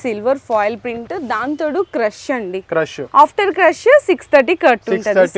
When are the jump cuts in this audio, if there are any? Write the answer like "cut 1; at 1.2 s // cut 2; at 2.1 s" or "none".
none